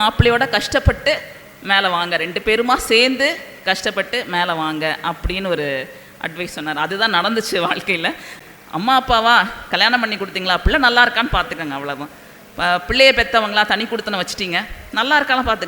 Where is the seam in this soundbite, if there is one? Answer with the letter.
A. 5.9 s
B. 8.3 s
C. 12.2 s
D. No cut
B